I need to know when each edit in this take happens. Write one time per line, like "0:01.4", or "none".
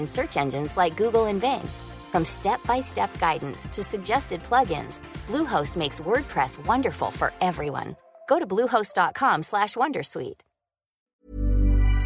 0:11.0

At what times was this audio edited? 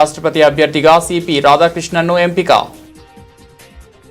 0:02.7

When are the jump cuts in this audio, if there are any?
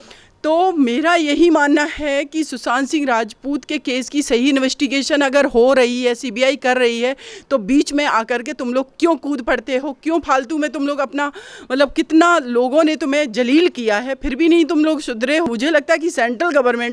0:15.5

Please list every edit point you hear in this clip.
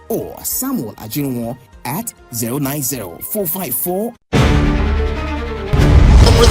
0:04.2

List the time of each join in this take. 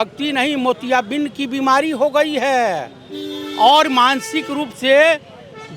none

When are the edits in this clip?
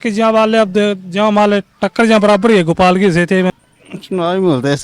0:03.6

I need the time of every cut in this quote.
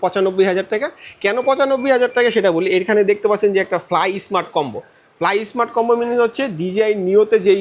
none

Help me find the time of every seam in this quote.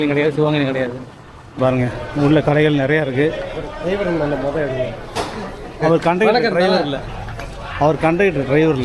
0:01.6

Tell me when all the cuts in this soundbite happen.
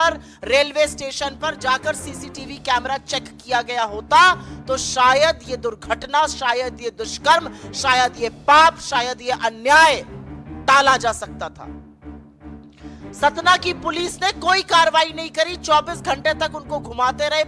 0:11.6
0:13.2

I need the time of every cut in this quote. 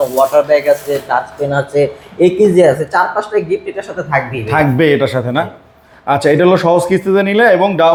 none

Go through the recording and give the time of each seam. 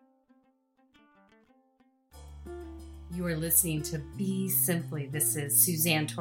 0:03.0

